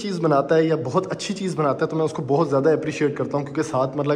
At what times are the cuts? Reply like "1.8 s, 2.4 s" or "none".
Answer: none